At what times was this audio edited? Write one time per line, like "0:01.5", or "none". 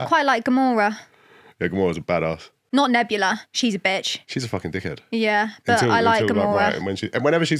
0:02.6

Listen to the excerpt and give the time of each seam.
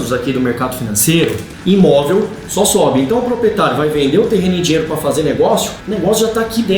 0:01.5
0:05.8

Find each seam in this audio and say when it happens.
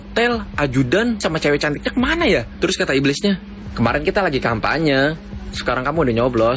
none

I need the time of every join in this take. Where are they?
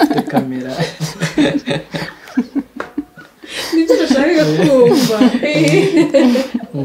none

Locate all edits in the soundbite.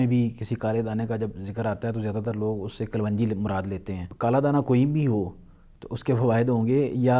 0:04.0

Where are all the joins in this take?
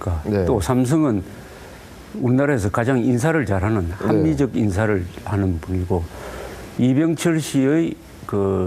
0:01.4

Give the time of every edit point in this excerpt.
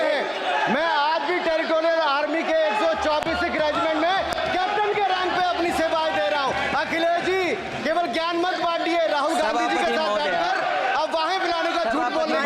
none

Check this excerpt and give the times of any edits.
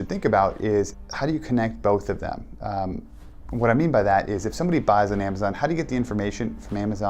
0:01.0

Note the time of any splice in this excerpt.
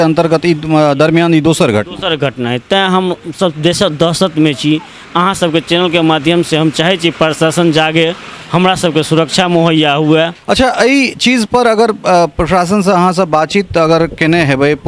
0:10.4

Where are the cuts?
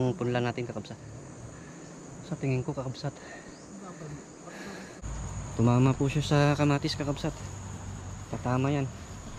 0:01.0
0:05.0

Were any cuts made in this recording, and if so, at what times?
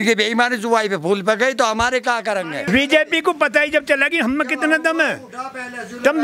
0:02.6

